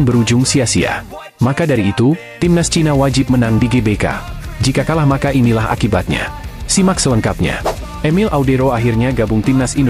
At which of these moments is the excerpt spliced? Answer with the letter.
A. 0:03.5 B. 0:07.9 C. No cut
B